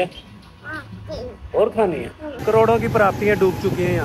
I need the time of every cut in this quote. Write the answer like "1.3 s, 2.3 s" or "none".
2.2 s